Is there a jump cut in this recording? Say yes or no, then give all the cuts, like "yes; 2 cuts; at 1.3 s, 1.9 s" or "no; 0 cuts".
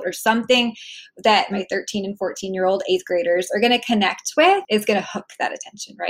yes; 2 cuts; at 1.5 s, 4.6 s